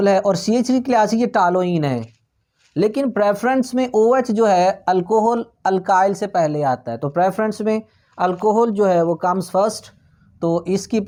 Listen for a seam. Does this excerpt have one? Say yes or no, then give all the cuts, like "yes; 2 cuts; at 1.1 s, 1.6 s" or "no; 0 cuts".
no; 0 cuts